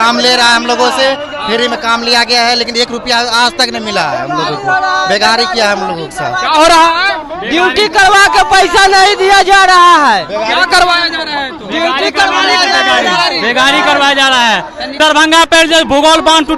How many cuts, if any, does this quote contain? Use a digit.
1